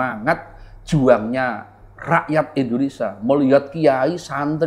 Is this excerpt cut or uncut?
uncut